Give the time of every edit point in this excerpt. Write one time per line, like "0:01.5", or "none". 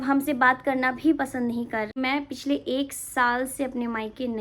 0:02.0

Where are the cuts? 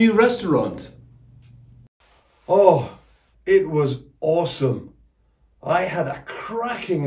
0:01.8

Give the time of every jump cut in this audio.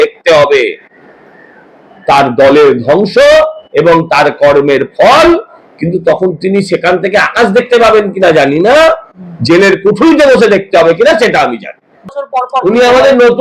0:12.2

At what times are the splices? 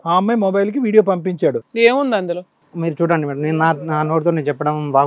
0:01.6

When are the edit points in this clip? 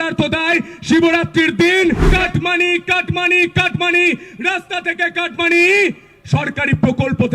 0:02.1

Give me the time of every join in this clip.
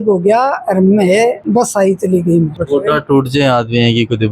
0:02.5

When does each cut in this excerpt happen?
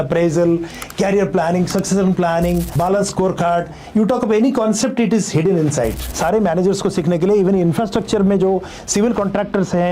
0:02.8
0:06.1

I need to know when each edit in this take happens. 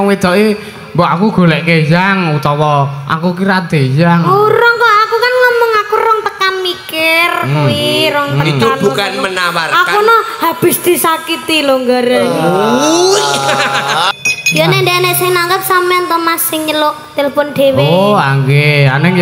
0:14.2

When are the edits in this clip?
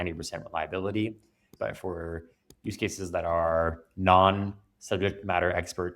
0:01.4

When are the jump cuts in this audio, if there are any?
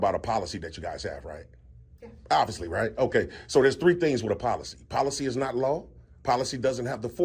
none

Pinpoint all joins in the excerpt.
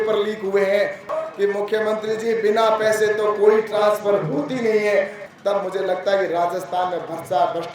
0:01.1
0:05.2

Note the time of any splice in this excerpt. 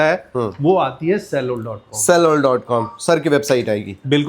none

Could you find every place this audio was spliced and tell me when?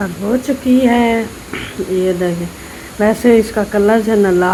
none

